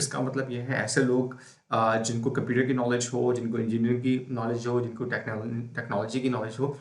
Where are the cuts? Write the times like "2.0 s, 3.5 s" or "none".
none